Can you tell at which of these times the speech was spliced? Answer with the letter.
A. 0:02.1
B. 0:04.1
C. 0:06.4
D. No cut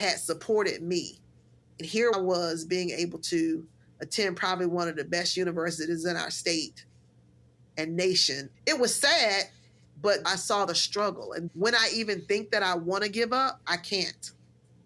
A